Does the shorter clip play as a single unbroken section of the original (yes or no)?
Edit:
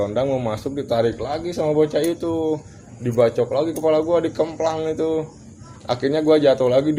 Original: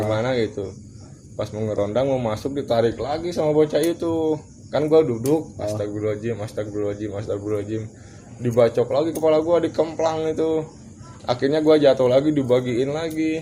no